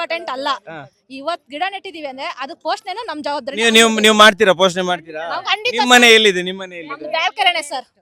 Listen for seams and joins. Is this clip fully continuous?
yes; 0 cuts

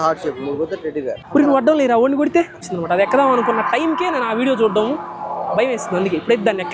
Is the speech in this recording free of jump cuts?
no; 1 cut; at 2.7 s

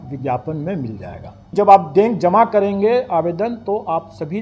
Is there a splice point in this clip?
yes; 1 cut; at 1.5 s

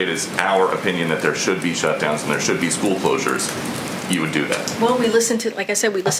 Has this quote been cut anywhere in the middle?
no; 0 cuts

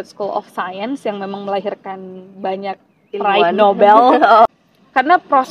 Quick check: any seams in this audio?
yes; 1 cut; at 4.5 s

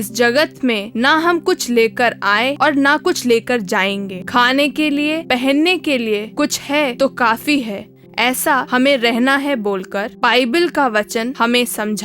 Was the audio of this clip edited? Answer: yes; 1 cut; at 6.9 s

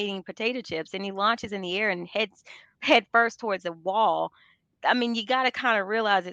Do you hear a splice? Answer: no; 0 cuts

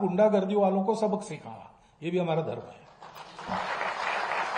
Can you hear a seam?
no; 0 cuts

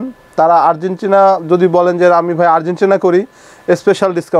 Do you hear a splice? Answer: no; 0 cuts

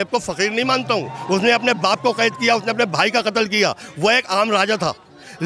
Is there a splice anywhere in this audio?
no; 0 cuts

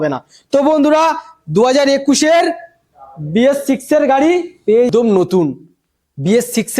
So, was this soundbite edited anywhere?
yes; 1 cut; at 4.9 s

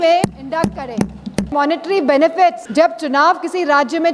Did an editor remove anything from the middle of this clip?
yes; 2 cuts; at 1.5 s, 2.6 s

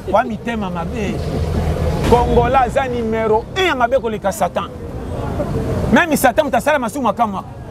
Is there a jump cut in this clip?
yes; 1 cut; at 2.0 s

